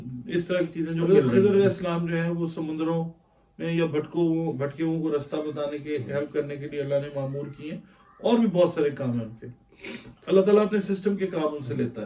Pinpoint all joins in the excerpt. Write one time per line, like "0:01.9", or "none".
0:01.2